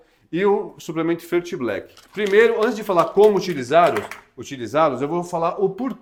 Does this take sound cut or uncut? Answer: uncut